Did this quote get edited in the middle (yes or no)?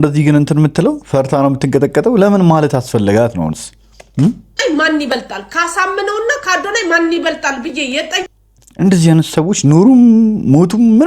no